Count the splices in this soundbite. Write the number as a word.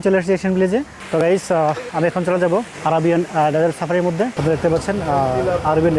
two